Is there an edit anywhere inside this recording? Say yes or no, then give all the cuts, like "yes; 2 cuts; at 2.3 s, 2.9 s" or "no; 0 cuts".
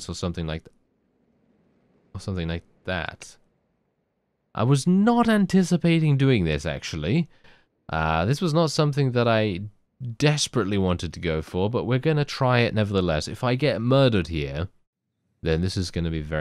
no; 0 cuts